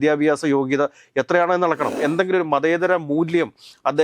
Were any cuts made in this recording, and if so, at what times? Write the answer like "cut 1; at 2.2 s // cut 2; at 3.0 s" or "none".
cut 1; at 2.0 s